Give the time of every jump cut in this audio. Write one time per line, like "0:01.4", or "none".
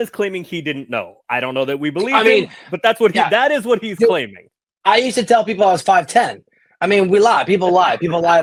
none